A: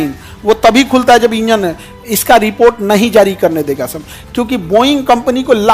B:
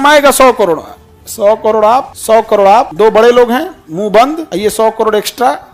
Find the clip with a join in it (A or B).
B